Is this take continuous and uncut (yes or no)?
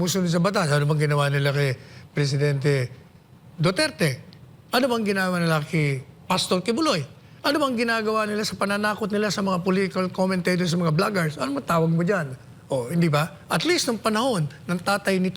yes